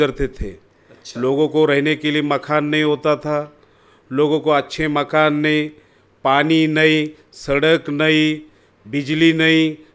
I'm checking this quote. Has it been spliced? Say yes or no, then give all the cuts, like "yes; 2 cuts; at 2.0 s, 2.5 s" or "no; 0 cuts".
no; 0 cuts